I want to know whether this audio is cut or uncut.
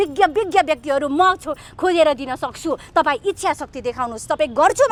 uncut